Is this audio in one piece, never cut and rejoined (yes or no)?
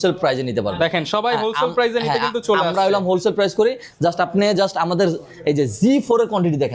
yes